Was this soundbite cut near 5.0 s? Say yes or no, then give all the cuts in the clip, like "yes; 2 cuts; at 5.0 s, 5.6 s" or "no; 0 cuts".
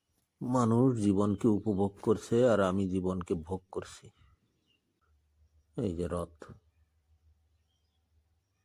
yes; 1 cut; at 5.0 s